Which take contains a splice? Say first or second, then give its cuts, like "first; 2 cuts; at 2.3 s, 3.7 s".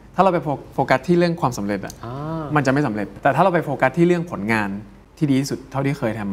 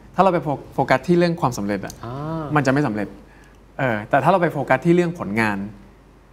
first; 2 cuts; at 3.1 s, 5.0 s